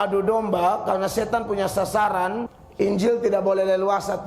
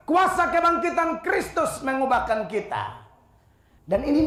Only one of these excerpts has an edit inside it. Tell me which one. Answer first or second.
first